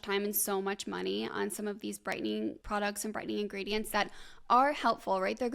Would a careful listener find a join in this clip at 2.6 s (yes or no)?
yes